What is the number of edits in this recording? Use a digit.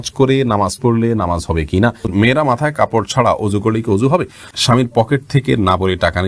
2